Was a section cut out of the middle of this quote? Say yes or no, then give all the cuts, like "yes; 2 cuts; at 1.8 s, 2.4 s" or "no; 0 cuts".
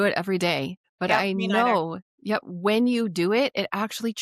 yes; 1 cut; at 1.2 s